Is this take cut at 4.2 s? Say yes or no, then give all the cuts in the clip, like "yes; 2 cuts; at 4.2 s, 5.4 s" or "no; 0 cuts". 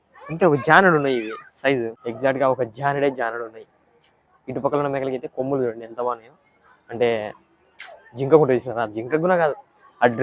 no; 1 cut; at 2.0 s